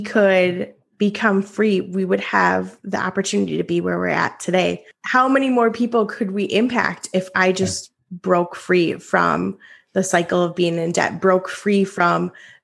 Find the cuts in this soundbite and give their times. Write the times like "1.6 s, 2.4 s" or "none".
4.8 s